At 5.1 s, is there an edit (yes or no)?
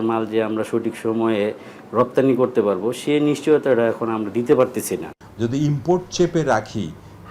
yes